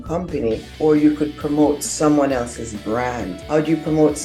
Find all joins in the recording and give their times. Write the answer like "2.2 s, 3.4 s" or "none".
none